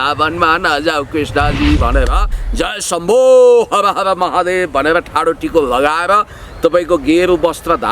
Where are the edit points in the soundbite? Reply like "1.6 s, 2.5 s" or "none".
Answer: 2.4 s